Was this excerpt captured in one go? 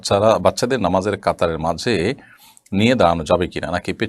yes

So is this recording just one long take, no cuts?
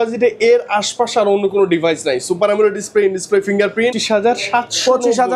no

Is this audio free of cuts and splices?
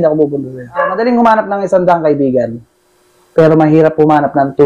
no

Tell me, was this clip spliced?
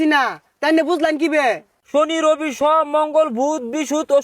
yes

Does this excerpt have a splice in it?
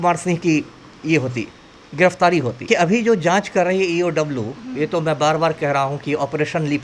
yes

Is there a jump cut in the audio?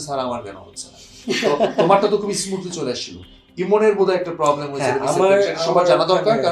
no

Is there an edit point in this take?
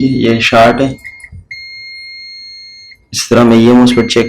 no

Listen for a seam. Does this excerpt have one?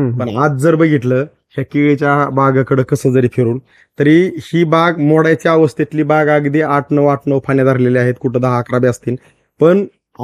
no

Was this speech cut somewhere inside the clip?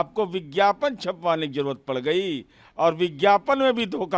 no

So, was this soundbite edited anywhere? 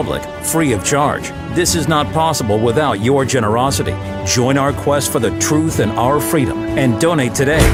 no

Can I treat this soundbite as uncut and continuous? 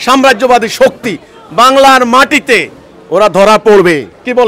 yes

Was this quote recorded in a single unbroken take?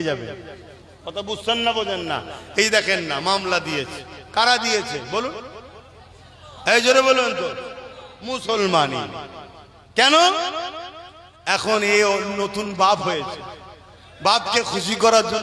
yes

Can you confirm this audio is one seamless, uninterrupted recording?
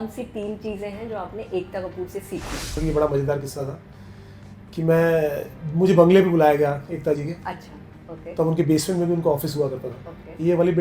no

